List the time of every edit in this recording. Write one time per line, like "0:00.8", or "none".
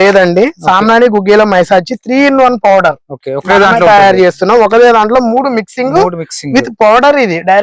none